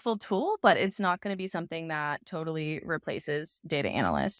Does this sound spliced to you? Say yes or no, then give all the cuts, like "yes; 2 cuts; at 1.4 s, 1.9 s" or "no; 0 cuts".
no; 0 cuts